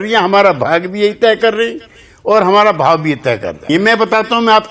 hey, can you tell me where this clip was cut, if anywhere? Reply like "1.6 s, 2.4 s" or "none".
3.7 s

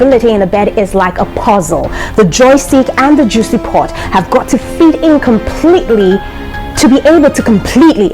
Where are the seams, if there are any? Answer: none

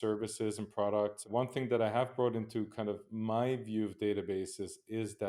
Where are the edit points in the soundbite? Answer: 1.2 s

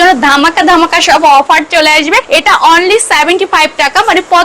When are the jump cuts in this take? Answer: 2.3 s

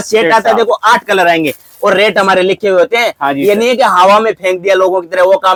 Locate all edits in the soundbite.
none

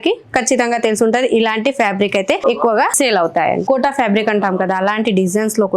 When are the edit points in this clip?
2.4 s, 3.6 s

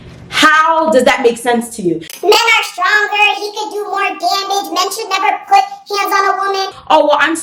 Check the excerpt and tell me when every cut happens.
2.0 s

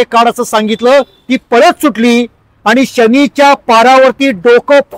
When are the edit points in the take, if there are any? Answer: none

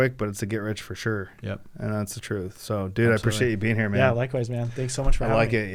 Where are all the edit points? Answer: none

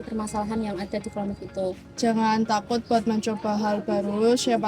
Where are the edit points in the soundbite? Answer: 1.8 s

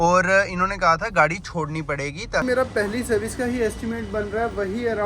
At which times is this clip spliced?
2.4 s

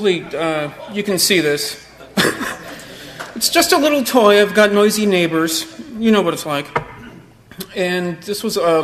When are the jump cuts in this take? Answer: none

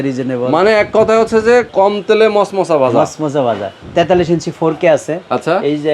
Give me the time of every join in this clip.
1.7 s, 3.7 s

